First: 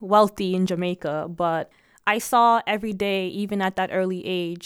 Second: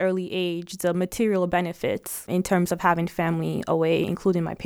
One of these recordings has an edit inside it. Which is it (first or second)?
first